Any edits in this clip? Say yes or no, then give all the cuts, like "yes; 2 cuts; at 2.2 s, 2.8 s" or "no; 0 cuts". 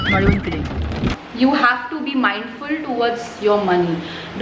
yes; 1 cut; at 1.2 s